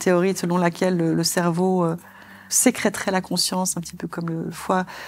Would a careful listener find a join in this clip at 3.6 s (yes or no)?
no